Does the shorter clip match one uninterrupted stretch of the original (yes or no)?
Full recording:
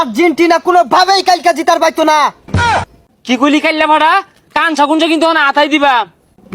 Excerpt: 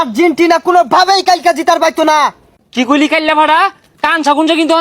no